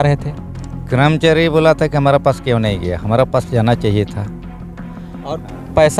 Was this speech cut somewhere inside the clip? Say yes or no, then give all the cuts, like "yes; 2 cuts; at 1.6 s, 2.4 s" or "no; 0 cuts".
no; 0 cuts